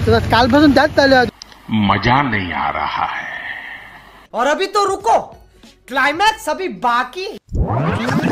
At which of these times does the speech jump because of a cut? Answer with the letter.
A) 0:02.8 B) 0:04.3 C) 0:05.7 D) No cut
D